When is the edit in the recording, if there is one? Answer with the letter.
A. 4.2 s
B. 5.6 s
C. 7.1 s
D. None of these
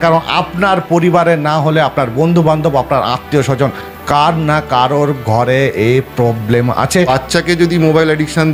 C